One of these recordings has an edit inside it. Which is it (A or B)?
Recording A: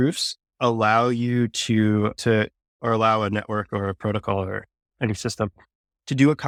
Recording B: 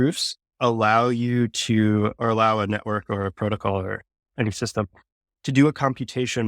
B